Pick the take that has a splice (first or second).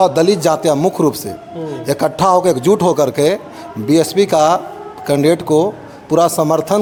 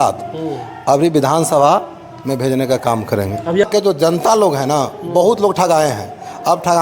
second